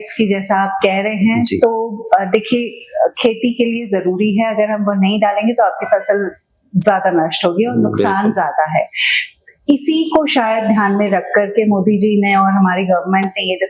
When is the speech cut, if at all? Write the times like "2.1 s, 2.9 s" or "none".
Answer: none